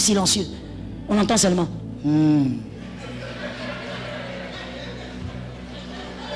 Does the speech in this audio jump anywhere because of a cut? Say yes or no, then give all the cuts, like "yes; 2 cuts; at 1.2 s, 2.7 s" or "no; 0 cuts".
no; 0 cuts